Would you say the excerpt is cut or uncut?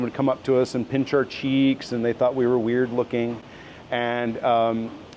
uncut